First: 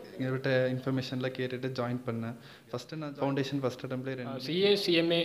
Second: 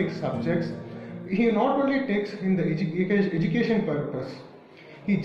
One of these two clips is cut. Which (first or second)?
first